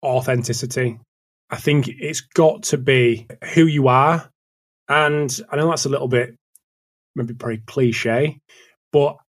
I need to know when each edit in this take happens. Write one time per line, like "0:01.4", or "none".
0:03.4

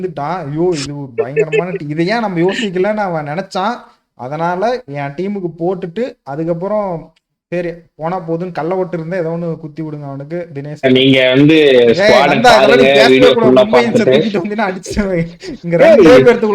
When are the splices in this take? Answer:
0:10.8

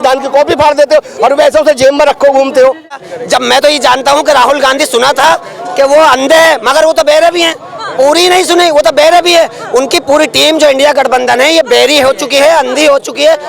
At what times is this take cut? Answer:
0:03.1

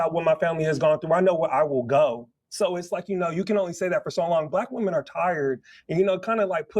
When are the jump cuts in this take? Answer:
0:02.8

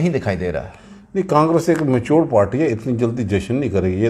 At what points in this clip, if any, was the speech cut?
none

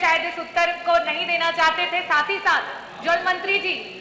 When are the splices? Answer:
none

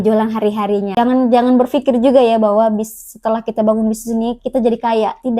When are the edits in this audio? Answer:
0:01.0

